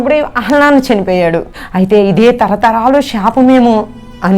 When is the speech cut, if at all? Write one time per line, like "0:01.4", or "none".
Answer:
0:01.6